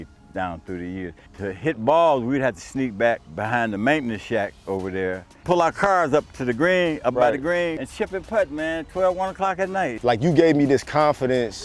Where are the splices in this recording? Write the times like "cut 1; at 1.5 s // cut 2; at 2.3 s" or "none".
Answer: cut 1; at 1.2 s // cut 2; at 3.3 s // cut 3; at 5.4 s // cut 4; at 7.8 s // cut 5; at 10.0 s